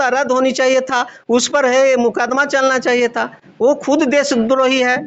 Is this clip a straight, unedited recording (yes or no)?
yes